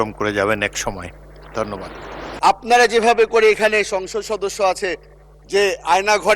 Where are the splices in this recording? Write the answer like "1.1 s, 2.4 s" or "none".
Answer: 2.4 s